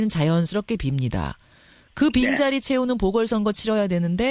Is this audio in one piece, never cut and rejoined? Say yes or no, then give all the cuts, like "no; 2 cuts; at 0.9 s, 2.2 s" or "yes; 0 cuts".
yes; 0 cuts